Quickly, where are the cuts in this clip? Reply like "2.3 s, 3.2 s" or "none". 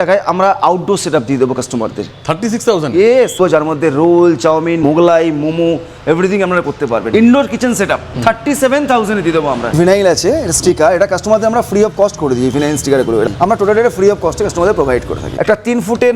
3.4 s, 4.8 s, 7.1 s, 8.1 s, 9.7 s, 13.3 s, 15.3 s